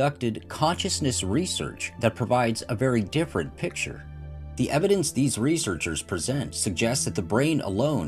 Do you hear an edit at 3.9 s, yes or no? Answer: yes